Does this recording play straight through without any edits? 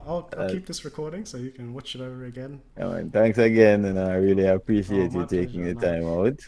no; 1 cut; at 2.6 s

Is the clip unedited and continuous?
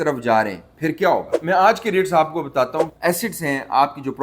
no; 2 cuts; at 1.3 s, 3.0 s

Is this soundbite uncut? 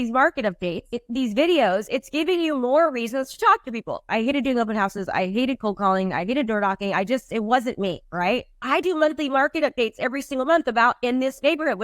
no; 3 cuts; at 0.9 s, 4.0 s, 8.5 s

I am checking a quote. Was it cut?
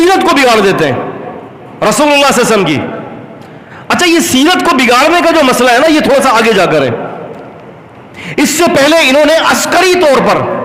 no; 0 cuts

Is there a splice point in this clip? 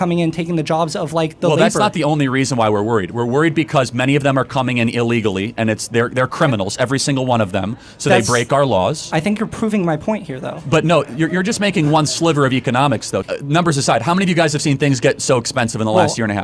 yes; 1 cut; at 15.1 s

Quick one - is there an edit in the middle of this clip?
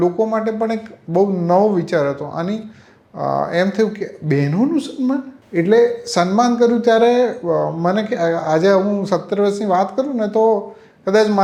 no; 0 cuts

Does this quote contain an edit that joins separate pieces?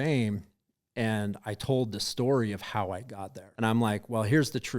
yes; 1 cut; at 3.5 s

